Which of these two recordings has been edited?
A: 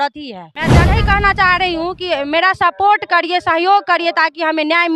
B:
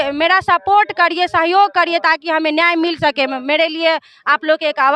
A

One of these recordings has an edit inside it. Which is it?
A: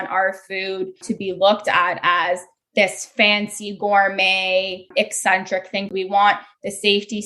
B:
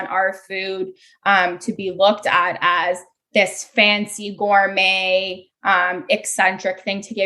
A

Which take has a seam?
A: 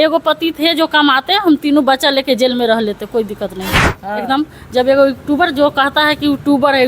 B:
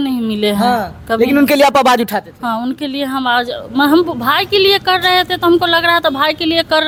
A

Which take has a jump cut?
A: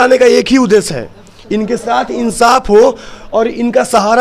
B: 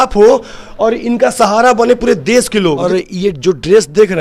B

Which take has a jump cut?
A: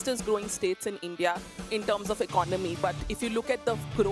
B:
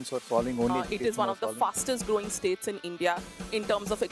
B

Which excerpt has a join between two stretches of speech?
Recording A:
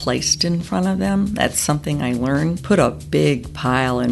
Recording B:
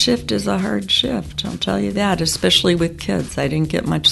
A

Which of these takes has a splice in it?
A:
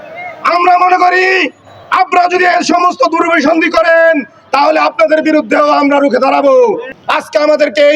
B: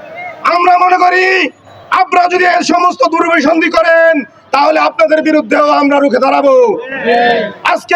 A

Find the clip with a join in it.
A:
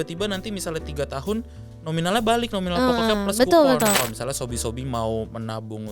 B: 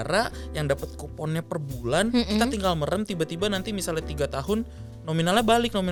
A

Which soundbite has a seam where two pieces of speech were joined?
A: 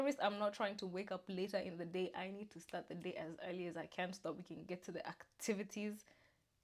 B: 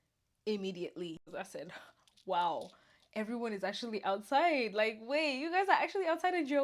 B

